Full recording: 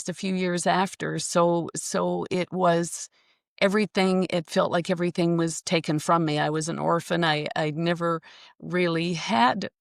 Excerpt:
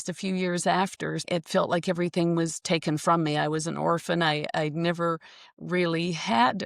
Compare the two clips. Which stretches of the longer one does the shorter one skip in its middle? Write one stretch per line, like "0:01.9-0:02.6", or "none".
0:01.3-0:04.3

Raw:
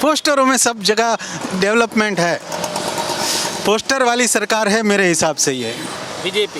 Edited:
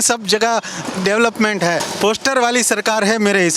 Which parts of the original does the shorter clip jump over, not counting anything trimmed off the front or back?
0:02.4-0:03.5

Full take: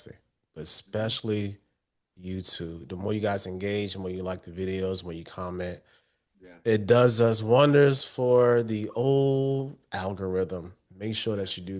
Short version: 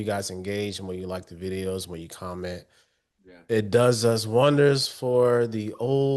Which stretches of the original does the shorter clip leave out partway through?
none

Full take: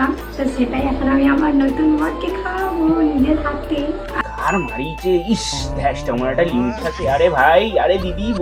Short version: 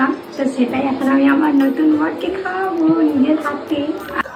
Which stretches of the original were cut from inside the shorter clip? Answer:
none

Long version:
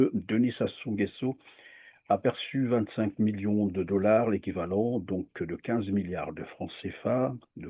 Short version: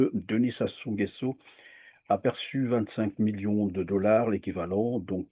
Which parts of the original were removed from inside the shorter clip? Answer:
none

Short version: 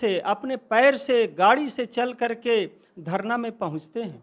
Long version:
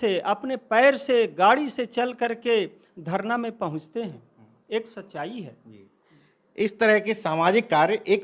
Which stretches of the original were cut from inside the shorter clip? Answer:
none

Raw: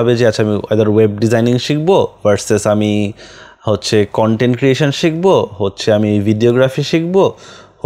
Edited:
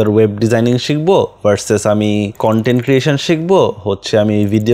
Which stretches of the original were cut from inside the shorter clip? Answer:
0:03.2-0:04.1

